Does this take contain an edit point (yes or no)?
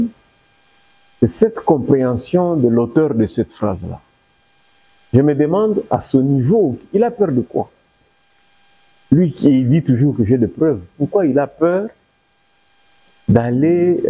no